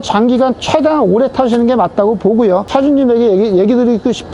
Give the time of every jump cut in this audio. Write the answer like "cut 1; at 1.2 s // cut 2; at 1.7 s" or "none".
cut 1; at 2.7 s